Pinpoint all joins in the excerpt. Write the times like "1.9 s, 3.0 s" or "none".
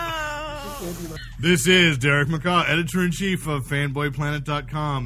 1.3 s